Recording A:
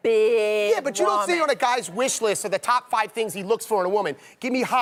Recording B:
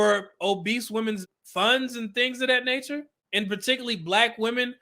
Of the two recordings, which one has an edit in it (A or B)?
B